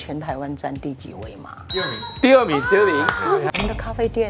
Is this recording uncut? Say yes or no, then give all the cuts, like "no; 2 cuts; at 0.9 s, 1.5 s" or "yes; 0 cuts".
no; 2 cuts; at 1.7 s, 3.5 s